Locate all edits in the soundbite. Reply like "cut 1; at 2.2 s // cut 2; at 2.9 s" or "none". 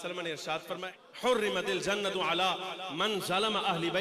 cut 1; at 0.9 s